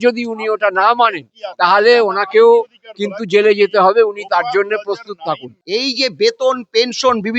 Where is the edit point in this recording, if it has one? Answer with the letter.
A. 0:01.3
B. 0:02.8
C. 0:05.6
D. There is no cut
C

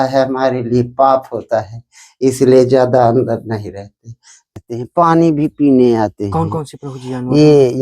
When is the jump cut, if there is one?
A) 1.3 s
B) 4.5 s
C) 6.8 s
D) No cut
B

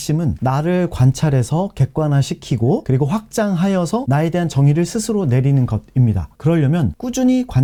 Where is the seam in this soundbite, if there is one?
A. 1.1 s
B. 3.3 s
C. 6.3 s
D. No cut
D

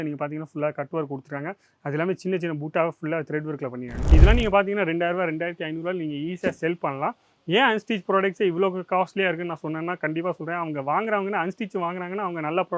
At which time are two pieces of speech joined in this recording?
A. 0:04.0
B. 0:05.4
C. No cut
A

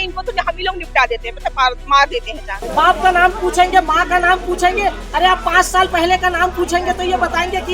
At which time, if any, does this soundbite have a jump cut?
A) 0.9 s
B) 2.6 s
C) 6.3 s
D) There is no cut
B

